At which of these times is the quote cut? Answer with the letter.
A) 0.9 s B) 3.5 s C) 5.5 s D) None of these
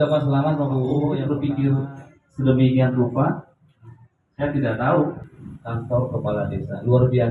A